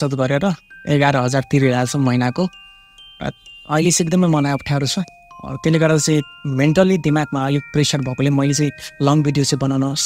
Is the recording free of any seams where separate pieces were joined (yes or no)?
yes